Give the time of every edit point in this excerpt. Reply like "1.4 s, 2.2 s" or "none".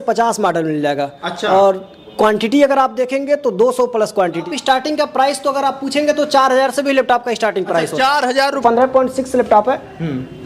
4.4 s, 8.6 s